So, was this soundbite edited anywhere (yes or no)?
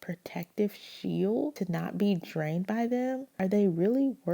yes